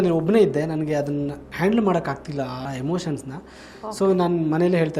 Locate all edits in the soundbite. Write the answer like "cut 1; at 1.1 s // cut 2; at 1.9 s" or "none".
cut 1; at 2.6 s